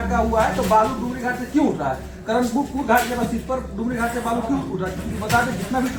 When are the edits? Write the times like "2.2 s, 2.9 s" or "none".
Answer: none